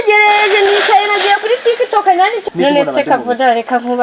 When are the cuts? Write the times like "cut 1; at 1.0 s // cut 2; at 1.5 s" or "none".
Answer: cut 1; at 2.4 s